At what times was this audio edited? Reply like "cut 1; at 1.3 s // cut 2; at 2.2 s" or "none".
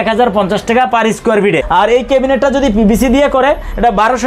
cut 1; at 1.6 s